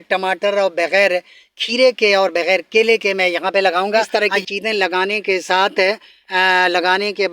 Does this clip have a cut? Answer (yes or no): yes